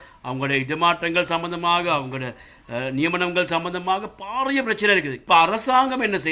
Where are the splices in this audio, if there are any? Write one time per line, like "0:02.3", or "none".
0:05.2